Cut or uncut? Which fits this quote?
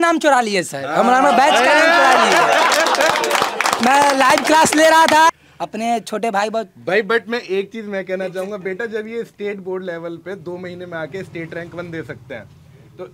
cut